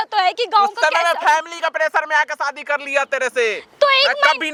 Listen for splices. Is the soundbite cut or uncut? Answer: uncut